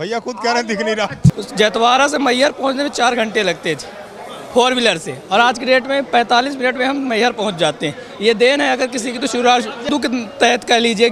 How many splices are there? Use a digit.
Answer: 2